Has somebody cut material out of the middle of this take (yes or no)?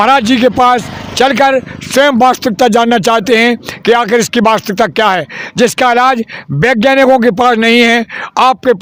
no